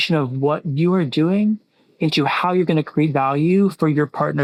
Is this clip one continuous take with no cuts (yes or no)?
yes